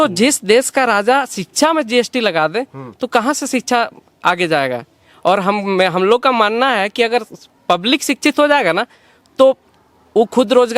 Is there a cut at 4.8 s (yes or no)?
no